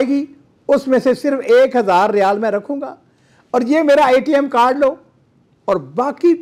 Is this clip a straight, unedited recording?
yes; 0 cuts

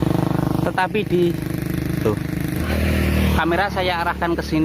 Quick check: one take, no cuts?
yes; 0 cuts

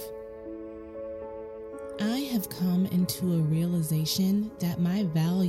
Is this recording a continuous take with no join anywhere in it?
yes; 0 cuts

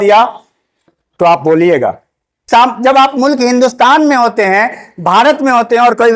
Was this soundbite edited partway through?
yes; 1 cut; at 2.5 s

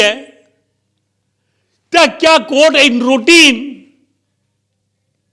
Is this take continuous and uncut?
yes; 0 cuts

